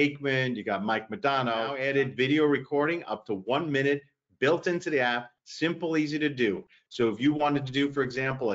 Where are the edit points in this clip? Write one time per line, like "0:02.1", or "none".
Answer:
0:01.7